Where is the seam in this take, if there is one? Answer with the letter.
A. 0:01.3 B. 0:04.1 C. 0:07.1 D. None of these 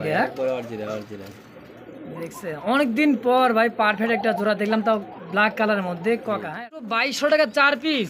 C